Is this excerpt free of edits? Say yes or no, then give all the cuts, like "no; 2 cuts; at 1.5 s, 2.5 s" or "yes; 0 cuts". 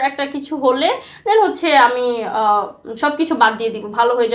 yes; 0 cuts